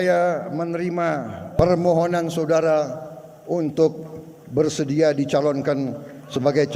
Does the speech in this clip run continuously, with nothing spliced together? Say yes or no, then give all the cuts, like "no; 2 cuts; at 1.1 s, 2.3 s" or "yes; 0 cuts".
no; 1 cut; at 1.6 s